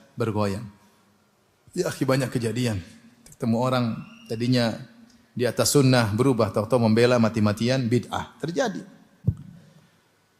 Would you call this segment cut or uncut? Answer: cut